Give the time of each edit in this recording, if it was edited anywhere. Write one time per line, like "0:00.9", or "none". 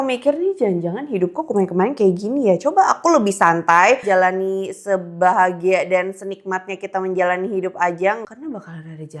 0:04.0
0:08.2